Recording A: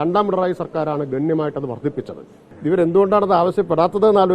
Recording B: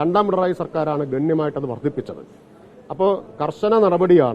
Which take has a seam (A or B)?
A